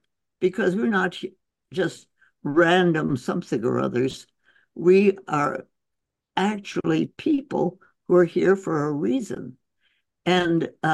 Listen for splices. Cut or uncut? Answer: uncut